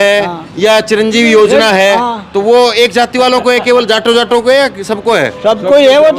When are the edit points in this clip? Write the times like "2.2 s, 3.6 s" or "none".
none

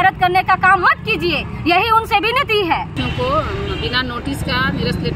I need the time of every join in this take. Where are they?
none

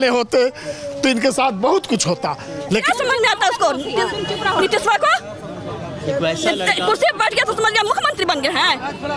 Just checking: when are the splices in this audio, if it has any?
2.9 s

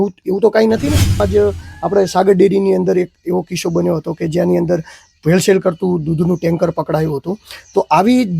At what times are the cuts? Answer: 1.2 s

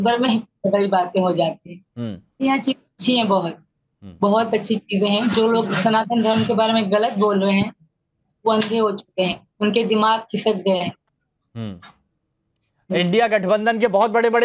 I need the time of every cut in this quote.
none

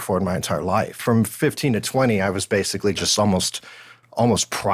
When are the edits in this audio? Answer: 1.0 s

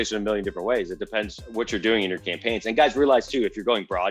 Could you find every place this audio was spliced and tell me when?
1.4 s

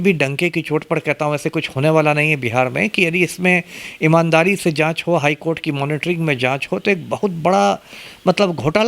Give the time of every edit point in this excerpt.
none

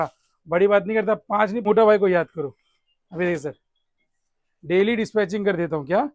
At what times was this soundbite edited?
1.6 s

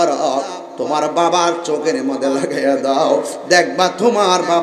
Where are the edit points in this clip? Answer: none

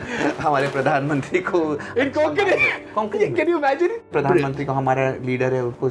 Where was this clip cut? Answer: 4.1 s

